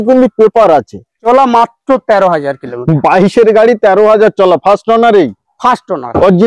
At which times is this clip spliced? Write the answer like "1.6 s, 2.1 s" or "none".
1.3 s